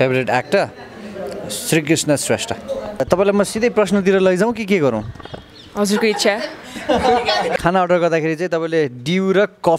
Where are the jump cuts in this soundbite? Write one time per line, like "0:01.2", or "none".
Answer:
0:03.0
0:07.6